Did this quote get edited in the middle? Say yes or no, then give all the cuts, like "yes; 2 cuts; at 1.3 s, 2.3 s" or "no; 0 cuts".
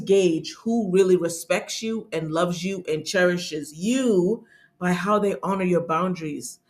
no; 0 cuts